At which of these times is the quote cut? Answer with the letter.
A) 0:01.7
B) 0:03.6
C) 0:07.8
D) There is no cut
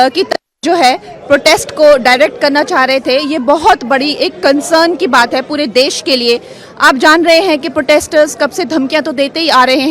D